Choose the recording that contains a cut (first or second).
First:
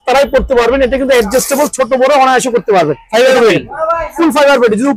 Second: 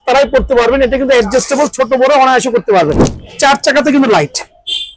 second